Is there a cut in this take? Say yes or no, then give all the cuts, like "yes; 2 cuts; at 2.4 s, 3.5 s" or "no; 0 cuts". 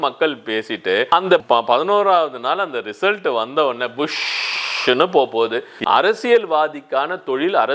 yes; 1 cut; at 5.7 s